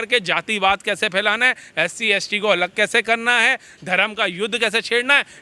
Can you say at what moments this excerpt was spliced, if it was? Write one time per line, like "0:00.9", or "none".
none